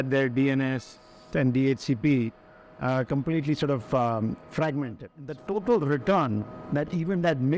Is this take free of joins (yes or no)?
no